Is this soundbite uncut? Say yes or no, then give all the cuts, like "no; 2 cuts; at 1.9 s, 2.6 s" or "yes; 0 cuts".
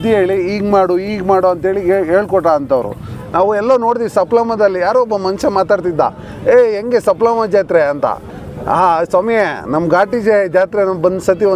no; 1 cut; at 3.1 s